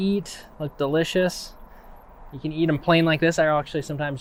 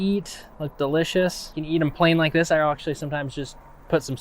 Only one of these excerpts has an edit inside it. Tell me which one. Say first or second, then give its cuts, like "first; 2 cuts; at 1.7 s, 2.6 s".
second; 1 cut; at 1.5 s